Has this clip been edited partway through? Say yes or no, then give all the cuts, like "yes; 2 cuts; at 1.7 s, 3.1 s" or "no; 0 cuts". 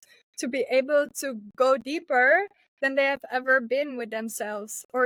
no; 0 cuts